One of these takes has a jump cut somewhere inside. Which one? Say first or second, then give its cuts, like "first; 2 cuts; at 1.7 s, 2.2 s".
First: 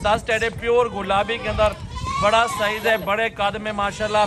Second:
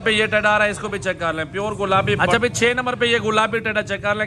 second; 1 cut; at 2.2 s